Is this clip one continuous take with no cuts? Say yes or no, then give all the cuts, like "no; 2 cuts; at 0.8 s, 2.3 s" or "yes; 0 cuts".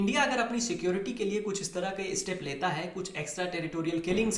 yes; 0 cuts